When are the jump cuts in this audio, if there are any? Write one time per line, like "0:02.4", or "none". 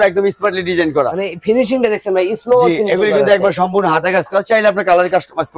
none